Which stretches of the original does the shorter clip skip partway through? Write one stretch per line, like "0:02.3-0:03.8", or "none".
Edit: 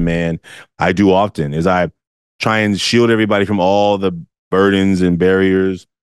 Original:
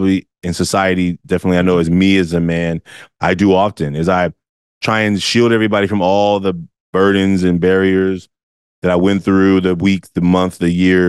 none